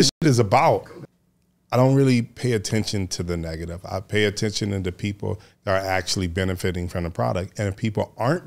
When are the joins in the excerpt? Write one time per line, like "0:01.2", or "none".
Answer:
0:00.9

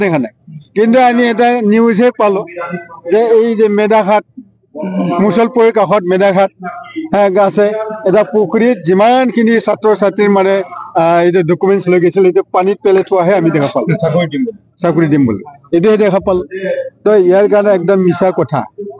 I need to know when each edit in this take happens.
none

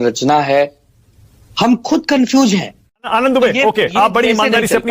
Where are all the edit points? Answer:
0:03.1

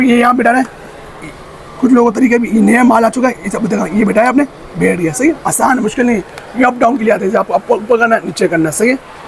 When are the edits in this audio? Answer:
none

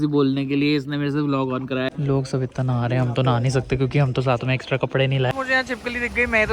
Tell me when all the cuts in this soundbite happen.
0:01.9
0:05.3

